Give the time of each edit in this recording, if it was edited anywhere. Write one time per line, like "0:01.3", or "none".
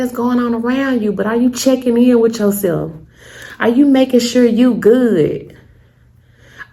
none